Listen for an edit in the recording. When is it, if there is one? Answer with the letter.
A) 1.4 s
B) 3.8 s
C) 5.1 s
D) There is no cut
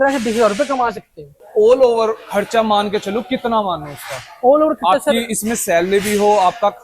A